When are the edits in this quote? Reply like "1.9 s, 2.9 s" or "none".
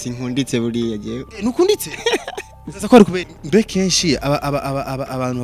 3.3 s